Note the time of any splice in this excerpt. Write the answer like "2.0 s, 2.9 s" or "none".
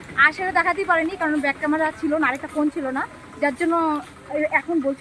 none

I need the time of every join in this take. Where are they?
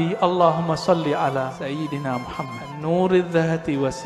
1.6 s, 2.7 s

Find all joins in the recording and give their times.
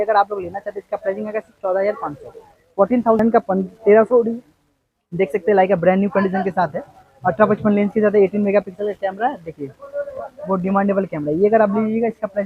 3.2 s

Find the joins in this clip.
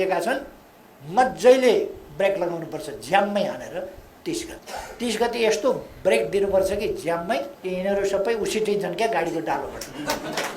4.6 s, 7.5 s

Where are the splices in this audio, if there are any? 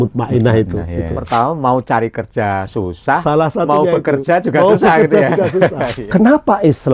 1.1 s, 5.9 s

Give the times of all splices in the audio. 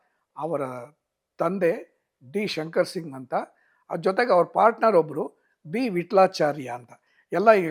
none

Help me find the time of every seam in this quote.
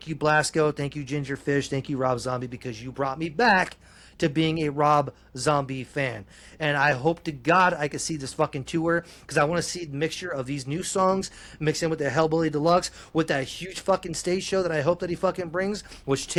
none

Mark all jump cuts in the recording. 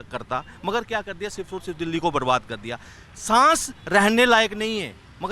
none

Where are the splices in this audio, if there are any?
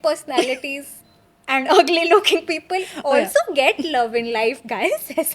none

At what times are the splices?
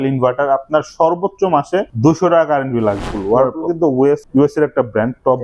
1.9 s, 3.1 s, 4.2 s

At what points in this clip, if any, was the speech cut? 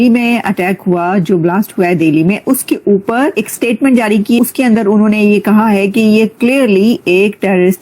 3.3 s, 4.4 s

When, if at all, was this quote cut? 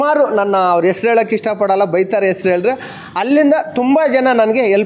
none

